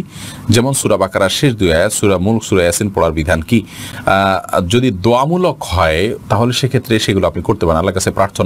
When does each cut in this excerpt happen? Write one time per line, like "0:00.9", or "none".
none